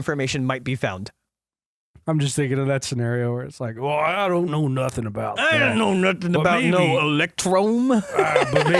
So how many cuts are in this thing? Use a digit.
0